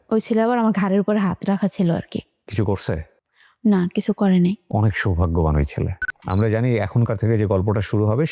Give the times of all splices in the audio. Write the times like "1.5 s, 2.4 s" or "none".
2.5 s, 6.3 s